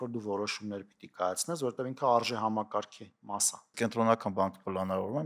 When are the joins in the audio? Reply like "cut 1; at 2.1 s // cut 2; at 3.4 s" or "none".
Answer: cut 1; at 3.7 s